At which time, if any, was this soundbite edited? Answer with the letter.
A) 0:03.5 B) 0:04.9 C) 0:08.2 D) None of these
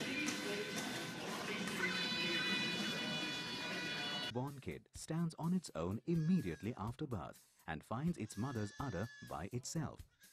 C